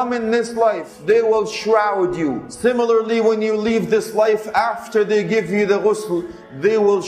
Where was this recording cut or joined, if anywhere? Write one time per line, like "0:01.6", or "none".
0:00.9
0:02.5